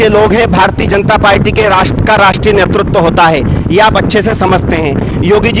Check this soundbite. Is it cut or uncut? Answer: uncut